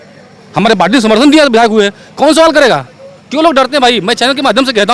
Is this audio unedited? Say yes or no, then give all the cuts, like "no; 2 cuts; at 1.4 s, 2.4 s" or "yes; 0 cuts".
yes; 0 cuts